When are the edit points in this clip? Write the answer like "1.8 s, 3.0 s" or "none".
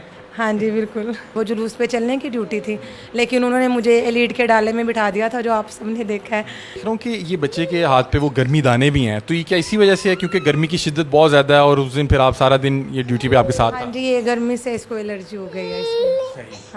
1.3 s, 6.6 s

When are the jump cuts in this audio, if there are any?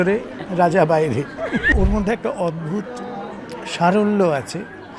1.7 s

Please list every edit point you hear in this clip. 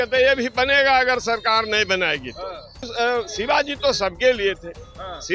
2.9 s

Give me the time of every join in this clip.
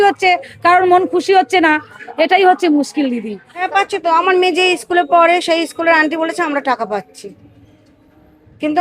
3.7 s

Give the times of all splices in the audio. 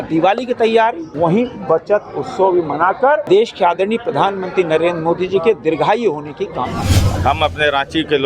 1.1 s, 3.2 s, 7.2 s

